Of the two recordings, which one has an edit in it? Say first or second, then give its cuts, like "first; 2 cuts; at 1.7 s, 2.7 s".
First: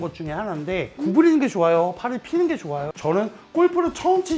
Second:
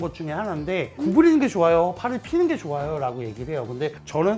first; 1 cut; at 2.9 s